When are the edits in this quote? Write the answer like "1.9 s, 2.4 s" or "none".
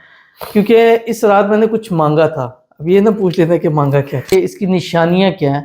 4.3 s

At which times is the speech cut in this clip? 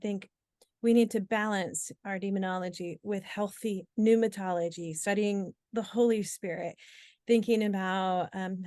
none

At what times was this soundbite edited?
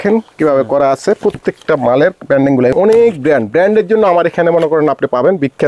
2.7 s

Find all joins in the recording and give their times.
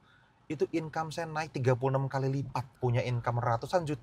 2.7 s

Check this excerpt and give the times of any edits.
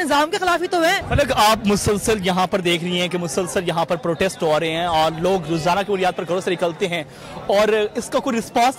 1.0 s

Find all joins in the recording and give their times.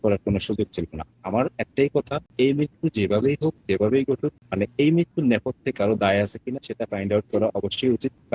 1.1 s

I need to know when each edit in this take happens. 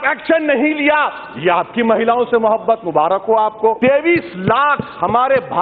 3.8 s

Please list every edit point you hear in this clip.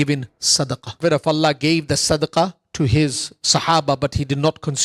1.0 s

